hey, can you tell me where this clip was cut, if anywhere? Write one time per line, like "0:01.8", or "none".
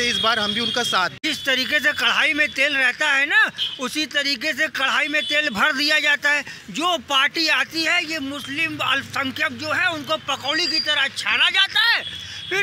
0:01.2